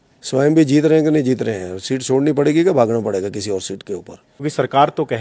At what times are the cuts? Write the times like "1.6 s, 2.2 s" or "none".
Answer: 4.2 s